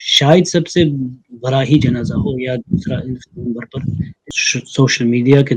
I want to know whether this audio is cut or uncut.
cut